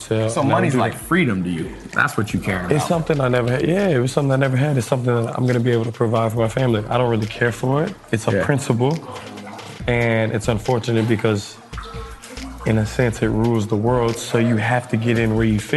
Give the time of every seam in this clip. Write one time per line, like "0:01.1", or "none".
none

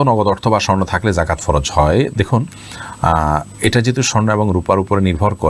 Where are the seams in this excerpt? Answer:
none

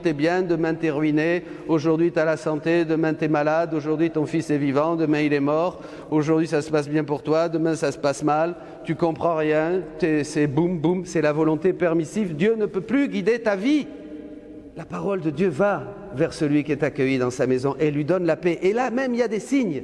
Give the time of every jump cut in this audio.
0:14.9

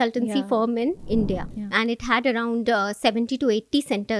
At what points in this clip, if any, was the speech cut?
0:01.2

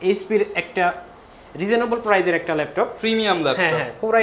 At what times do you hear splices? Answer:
none

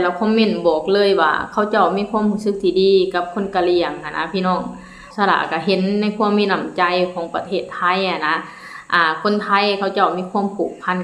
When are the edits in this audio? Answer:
0:05.0

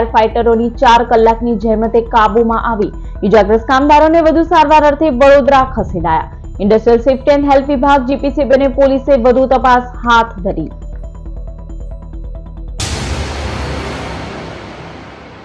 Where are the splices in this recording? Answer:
0:12.9

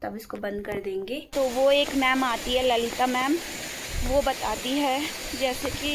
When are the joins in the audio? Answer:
0:01.3

